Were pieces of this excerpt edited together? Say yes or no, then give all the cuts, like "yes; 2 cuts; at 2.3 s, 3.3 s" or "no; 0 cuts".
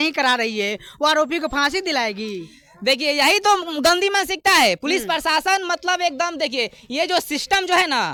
no; 0 cuts